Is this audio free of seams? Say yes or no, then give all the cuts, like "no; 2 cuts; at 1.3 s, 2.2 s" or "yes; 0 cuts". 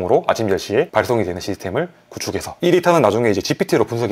yes; 0 cuts